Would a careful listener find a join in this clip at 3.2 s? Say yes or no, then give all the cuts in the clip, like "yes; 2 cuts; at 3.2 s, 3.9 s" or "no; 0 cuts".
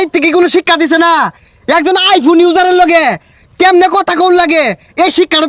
no; 0 cuts